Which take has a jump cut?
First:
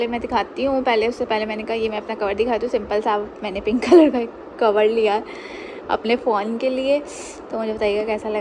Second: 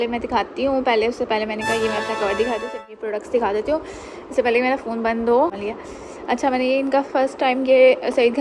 second; 2 cuts; at 2.9 s, 5.6 s

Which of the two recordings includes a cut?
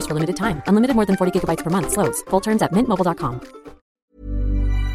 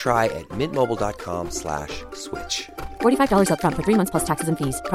first; 1 cut; at 3.9 s

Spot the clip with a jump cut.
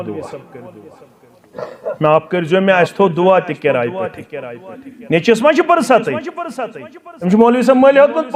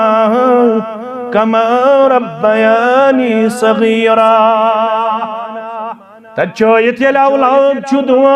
second; 1 cut; at 5.3 s

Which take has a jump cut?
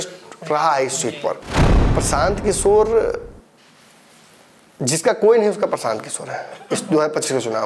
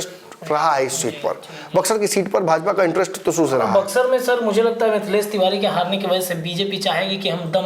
first; 1 cut; at 1.8 s

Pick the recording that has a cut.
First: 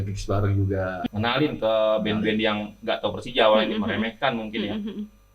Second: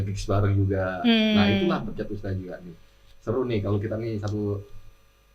first; 1 cut; at 1.0 s

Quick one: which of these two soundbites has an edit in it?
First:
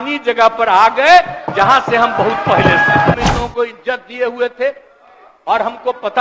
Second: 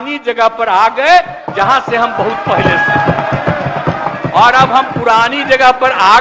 first; 1 cut; at 3.1 s

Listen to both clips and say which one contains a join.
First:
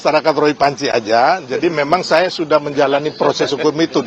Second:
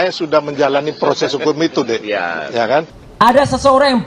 second; 1 cut; at 3.0 s

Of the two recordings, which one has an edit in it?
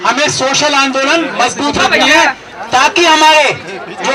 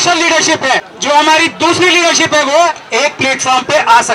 second; 1 cut; at 0.9 s

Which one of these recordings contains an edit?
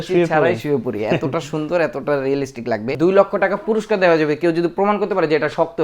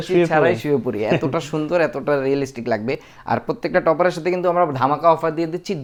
first; 1 cut; at 2.9 s

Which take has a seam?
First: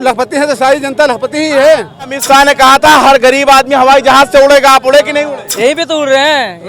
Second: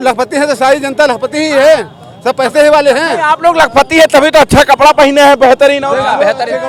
first; 2 cuts; at 2.2 s, 5.4 s

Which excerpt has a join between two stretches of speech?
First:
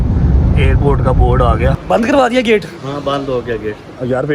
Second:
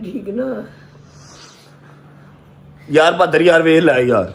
first; 1 cut; at 1.9 s

